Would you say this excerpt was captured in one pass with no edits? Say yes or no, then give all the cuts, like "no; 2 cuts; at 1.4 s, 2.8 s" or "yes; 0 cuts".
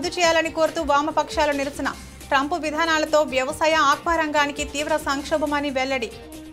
yes; 0 cuts